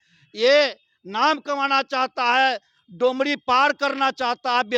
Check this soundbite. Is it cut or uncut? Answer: uncut